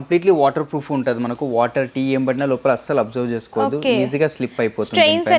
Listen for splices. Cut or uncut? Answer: uncut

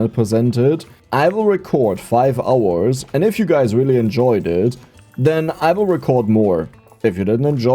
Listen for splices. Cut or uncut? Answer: cut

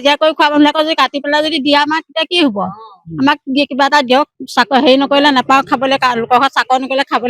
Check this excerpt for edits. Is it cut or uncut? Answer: cut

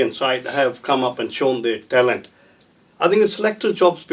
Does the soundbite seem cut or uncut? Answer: uncut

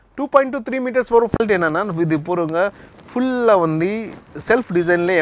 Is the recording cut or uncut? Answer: cut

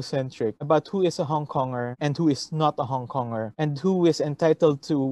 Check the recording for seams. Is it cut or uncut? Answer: uncut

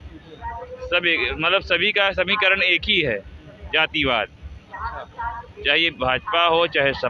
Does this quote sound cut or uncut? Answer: uncut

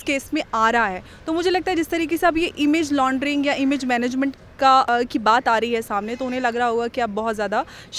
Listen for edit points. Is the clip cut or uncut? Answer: cut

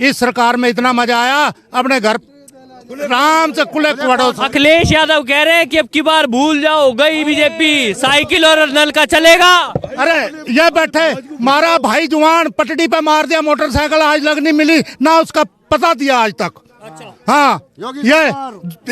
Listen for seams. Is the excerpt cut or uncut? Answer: uncut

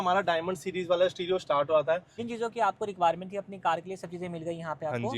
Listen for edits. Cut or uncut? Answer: cut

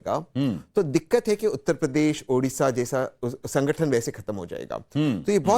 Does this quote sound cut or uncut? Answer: cut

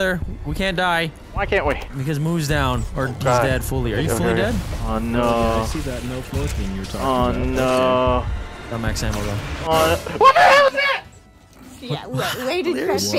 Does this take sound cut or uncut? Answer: cut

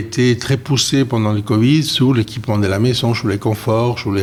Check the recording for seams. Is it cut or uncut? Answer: uncut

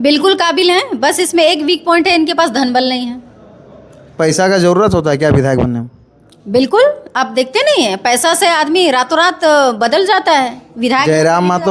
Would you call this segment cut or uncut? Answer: uncut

